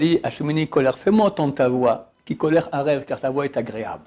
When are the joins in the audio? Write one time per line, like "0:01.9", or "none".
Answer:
none